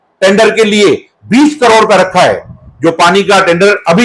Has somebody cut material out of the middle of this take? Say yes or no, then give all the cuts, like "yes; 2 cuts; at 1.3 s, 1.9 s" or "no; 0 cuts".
no; 0 cuts